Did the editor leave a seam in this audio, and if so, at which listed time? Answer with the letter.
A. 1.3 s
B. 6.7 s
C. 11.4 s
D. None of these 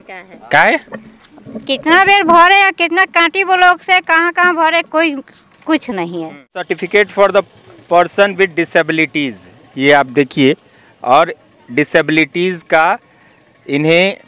B